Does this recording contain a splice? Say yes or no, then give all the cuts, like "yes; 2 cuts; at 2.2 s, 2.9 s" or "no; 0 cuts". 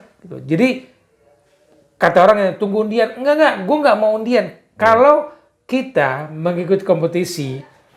no; 0 cuts